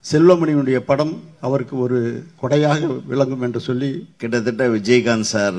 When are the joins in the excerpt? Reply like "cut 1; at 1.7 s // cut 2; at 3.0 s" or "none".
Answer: cut 1; at 4.1 s